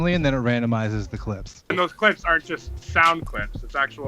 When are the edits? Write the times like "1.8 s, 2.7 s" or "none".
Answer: 1.7 s